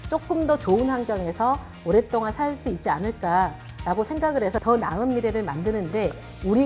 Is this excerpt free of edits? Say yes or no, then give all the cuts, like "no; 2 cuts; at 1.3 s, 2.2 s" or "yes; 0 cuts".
no; 1 cut; at 4.6 s